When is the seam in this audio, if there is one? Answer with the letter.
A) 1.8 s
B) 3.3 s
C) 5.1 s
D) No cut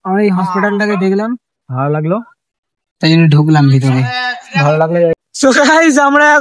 C